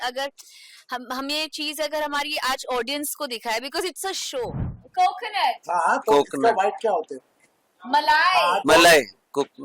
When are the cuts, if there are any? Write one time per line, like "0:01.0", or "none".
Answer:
0:04.8